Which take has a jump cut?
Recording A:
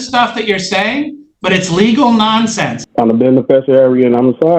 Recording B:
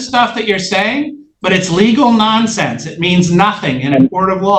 A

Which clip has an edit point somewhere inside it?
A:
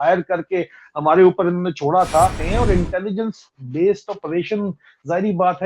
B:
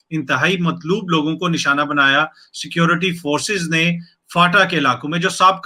A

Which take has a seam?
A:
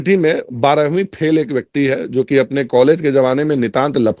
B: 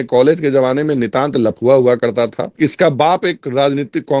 B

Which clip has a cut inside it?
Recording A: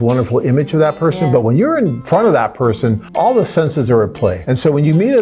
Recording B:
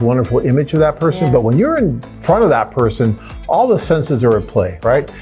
A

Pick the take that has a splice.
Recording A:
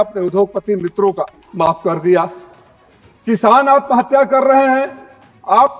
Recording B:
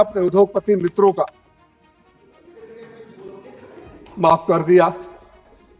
A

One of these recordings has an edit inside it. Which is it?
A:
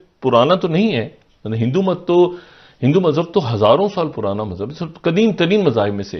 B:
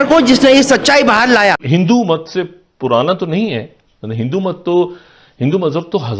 B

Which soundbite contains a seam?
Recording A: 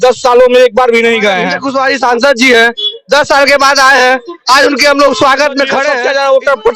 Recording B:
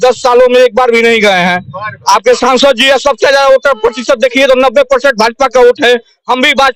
A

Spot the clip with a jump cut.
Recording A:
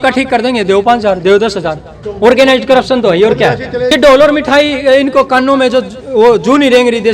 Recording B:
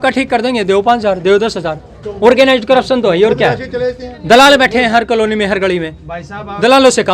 A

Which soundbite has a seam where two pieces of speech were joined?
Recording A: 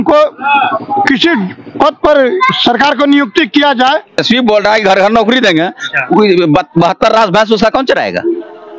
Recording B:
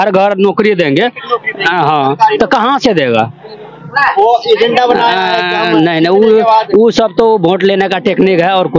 A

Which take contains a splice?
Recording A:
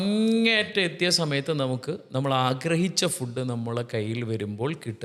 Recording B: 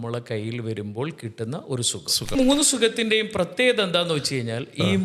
B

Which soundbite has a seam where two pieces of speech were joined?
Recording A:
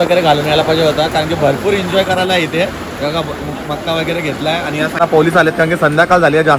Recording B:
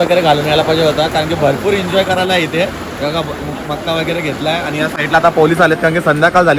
A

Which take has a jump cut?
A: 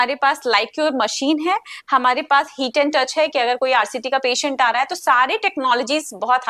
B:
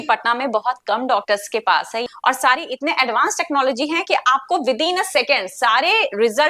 B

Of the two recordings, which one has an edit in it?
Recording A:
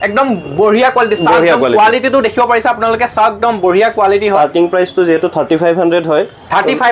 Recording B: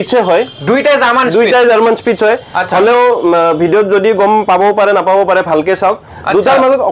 A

